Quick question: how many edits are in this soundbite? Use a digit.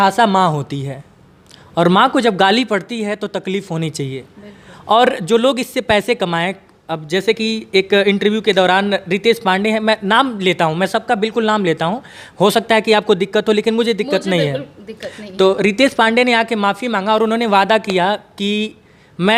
0